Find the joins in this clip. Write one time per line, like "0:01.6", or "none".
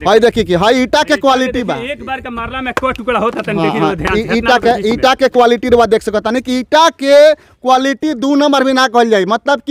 none